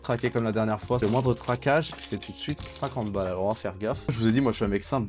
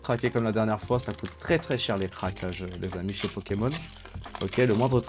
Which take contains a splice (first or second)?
first